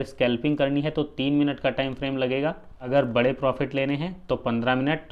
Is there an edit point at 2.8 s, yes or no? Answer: yes